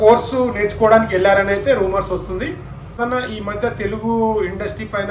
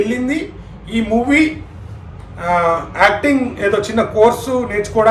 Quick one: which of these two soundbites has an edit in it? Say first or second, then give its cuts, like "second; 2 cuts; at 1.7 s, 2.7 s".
first; 1 cut; at 3.0 s